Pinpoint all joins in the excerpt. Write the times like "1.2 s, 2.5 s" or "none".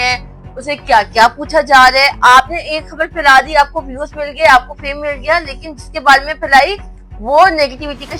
none

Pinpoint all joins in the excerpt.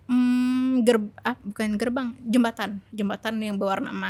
none

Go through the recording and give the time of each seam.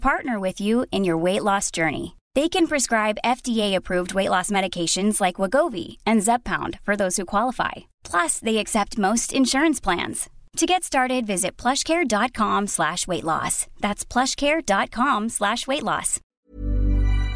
16.2 s

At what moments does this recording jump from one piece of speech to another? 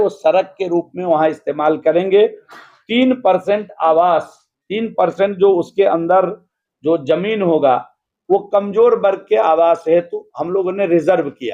none

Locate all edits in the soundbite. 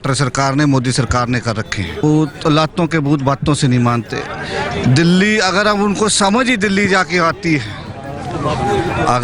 2.0 s

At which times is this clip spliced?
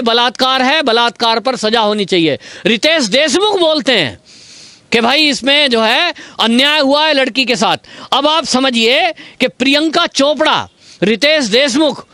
none

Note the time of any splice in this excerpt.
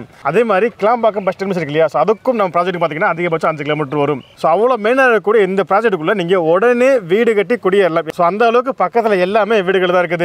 none

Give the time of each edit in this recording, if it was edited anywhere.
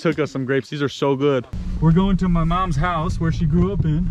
1.6 s

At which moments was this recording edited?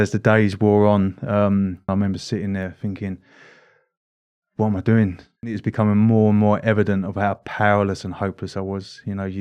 1.9 s, 5.6 s

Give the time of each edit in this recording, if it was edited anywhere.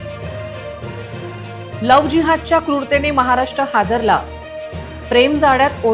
1.2 s

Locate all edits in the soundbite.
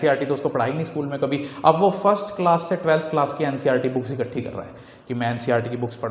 none

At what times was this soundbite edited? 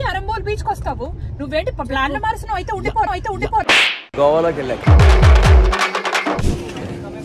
3.9 s

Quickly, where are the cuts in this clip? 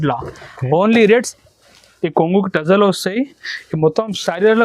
1.3 s

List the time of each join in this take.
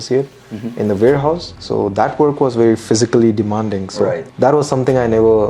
1.5 s, 4.3 s

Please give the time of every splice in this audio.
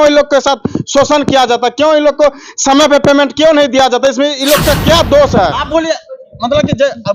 5.5 s

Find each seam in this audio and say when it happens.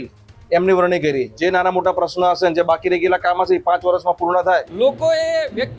1.3 s, 4.7 s

